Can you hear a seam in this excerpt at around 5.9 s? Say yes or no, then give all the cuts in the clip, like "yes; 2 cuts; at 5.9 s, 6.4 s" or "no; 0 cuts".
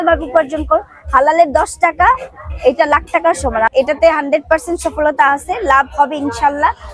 no; 1 cut; at 3.7 s